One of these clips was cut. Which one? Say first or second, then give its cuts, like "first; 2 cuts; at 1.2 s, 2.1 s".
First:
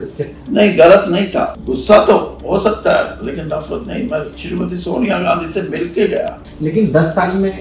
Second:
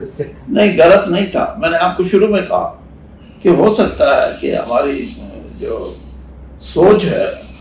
first; 2 cuts; at 1.5 s, 6.4 s